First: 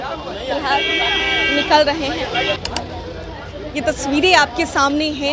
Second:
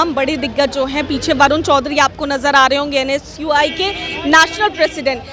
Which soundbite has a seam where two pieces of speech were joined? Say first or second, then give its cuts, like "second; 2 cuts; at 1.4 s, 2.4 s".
first; 1 cut; at 2.6 s